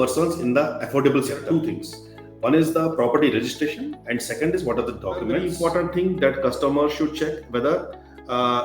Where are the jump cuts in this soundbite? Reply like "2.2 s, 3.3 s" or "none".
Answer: 1.5 s, 5.5 s